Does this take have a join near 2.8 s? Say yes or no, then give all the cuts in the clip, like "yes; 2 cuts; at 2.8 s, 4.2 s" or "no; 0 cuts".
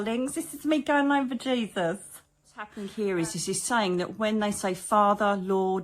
yes; 1 cut; at 2.8 s